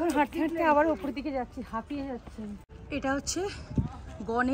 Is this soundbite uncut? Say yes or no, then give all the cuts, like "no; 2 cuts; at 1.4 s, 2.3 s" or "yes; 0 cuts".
no; 1 cut; at 2.7 s